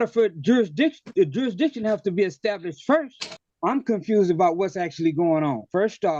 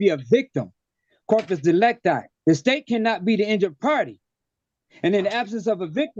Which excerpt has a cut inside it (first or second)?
first